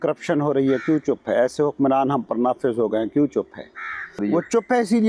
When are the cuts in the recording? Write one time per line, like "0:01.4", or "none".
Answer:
0:04.2